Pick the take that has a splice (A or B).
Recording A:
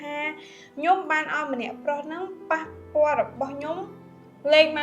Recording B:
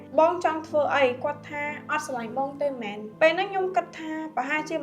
B